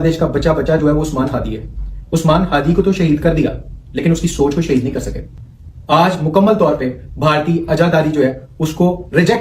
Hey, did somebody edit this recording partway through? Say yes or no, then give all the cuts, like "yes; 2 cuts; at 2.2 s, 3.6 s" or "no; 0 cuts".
no; 0 cuts